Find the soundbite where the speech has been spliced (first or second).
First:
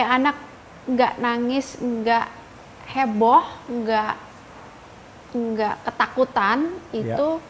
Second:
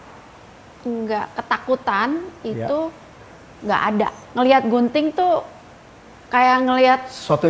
second